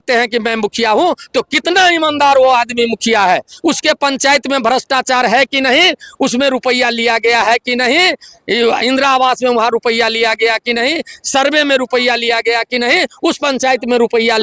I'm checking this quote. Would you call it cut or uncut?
uncut